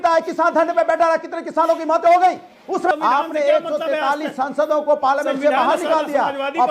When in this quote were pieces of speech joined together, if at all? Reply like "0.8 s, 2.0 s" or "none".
2.9 s